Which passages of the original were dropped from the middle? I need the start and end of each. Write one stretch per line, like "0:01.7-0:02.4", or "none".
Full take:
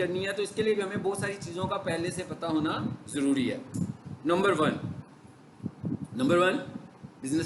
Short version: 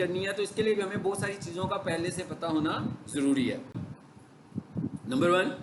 0:03.7-0:04.8